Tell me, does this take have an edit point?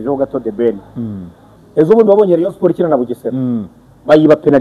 yes; 1 cut; at 1.6 s

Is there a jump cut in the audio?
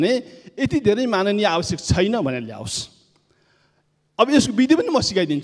no; 0 cuts

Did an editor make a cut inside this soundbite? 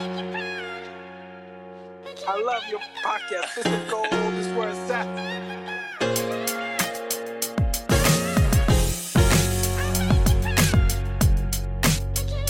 yes; 1 cut; at 1.3 s

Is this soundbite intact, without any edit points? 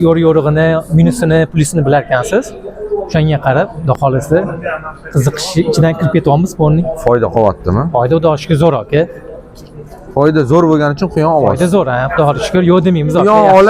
yes; 0 cuts

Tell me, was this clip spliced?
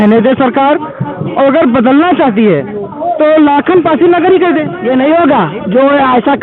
yes; 1 cut; at 4.7 s

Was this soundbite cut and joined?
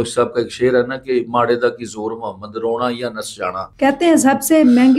yes; 1 cut; at 3.6 s

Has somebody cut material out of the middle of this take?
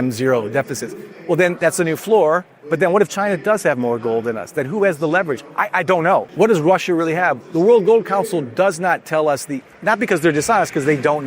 yes; 1 cut; at 6.3 s

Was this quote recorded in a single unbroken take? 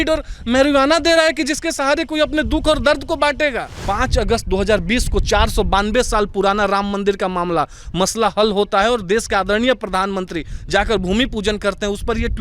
no; 1 cut; at 3.7 s

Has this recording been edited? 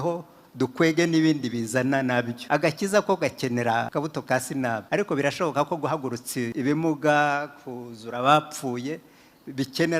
yes; 4 cuts; at 2.4 s, 3.9 s, 4.8 s, 6.5 s

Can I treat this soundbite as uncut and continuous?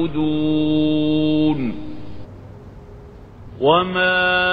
yes; 0 cuts

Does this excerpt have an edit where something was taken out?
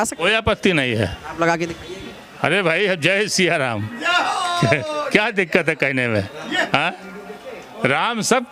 no; 0 cuts

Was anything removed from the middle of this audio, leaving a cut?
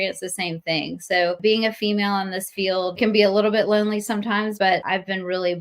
yes; 3 cuts; at 1.4 s, 3.0 s, 4.6 s

